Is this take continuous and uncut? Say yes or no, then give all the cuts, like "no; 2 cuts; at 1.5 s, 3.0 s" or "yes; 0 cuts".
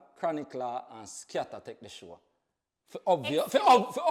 yes; 0 cuts